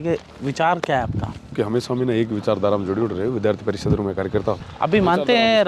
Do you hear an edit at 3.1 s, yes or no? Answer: no